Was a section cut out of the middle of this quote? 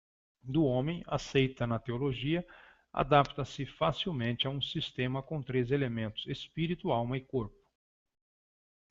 yes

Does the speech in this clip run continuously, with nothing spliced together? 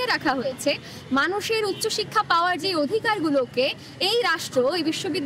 yes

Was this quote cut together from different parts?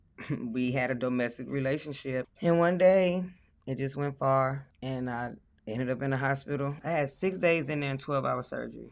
yes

